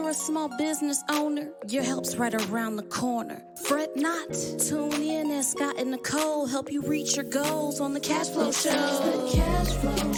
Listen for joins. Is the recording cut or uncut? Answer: uncut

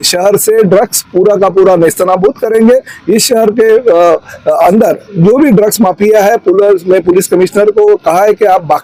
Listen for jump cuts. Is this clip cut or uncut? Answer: uncut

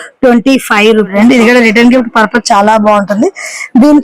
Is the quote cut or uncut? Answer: cut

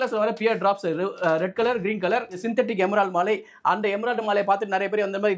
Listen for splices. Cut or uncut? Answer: cut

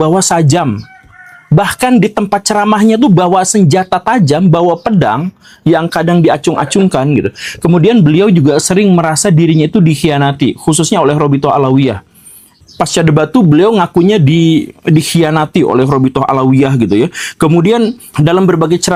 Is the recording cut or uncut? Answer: uncut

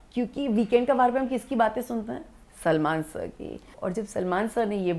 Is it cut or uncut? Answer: cut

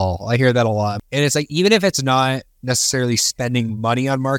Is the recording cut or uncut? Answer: cut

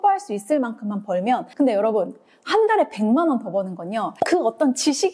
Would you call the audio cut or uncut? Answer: cut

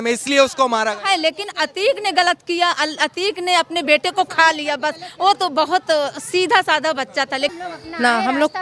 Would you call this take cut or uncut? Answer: cut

